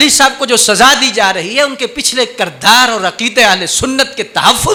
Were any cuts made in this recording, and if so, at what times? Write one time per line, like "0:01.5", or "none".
none